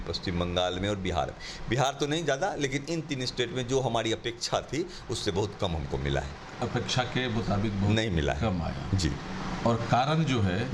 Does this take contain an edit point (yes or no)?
no